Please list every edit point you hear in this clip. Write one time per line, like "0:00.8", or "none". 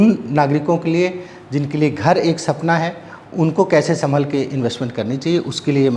none

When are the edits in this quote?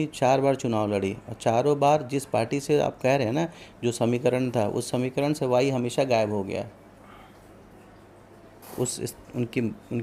none

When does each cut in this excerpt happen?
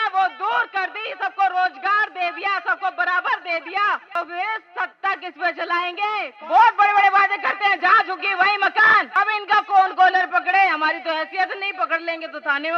0:04.1
0:06.3
0:09.1

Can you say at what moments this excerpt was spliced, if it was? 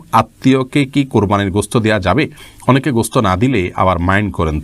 none

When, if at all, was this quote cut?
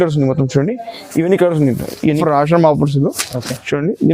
0:02.2

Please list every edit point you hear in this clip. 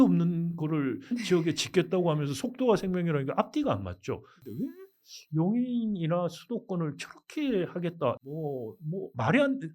0:04.5
0:08.2

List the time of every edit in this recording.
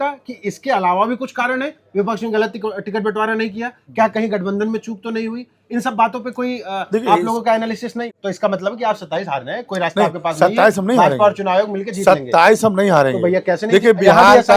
0:07.9

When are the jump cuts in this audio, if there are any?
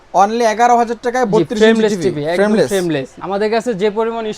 0:03.1

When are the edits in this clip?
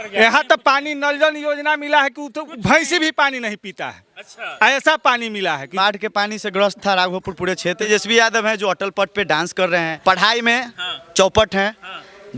0:05.7
0:07.9
0:09.9

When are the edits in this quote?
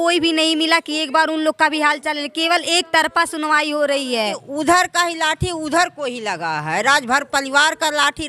0:04.2

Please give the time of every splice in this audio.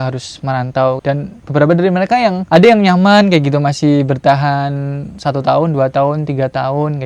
0:01.0

